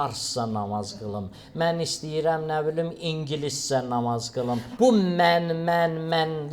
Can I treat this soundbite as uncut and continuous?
no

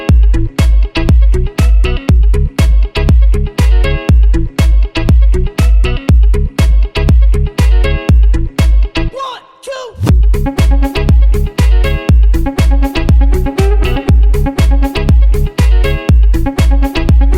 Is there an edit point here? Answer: yes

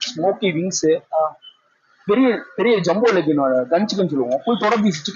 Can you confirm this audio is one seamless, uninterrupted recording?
yes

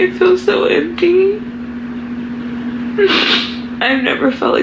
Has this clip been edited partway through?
no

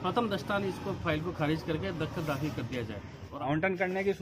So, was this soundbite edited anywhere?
yes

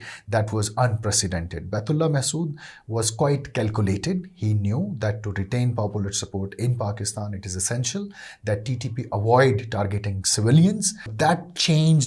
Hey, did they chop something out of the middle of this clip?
yes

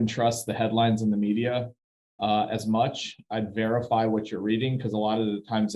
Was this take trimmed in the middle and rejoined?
no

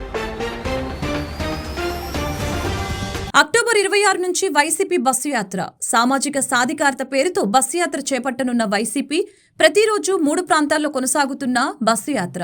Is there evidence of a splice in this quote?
no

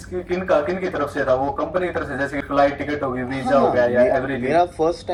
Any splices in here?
no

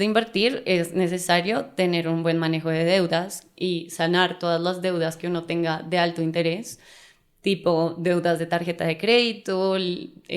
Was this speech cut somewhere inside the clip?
no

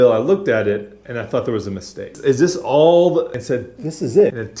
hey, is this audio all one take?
yes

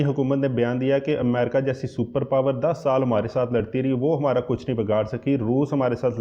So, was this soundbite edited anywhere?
no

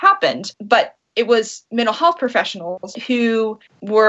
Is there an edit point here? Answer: yes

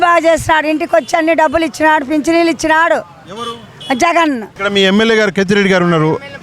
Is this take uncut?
no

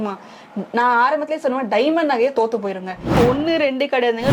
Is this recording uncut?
no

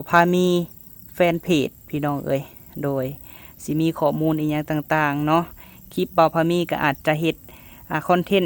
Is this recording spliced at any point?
no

